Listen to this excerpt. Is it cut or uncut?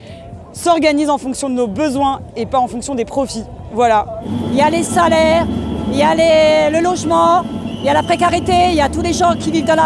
cut